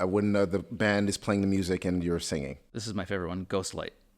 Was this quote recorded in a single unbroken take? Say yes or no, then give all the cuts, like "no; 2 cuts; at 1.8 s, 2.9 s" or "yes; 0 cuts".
no; 1 cut; at 2.7 s